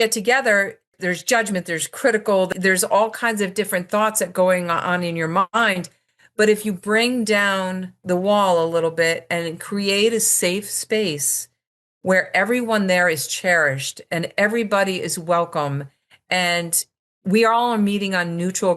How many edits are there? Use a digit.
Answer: 2